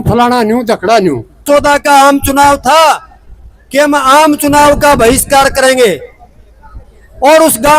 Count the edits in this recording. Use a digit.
1